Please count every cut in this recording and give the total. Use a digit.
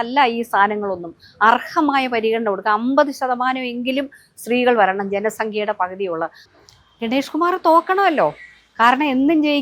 1